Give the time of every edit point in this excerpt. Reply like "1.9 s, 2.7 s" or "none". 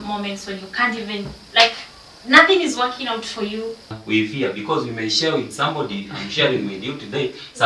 4.0 s